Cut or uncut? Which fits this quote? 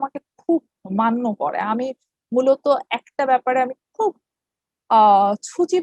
uncut